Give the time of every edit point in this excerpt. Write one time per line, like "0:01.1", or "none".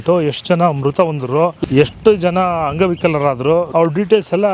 0:01.6
0:03.7